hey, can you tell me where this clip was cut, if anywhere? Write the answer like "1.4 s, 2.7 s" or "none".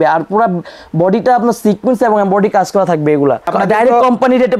3.5 s